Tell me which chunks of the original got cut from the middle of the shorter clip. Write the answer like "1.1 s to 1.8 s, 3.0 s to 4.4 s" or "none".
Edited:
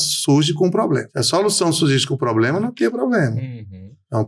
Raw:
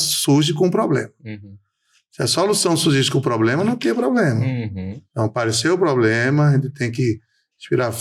1.1 s to 2.1 s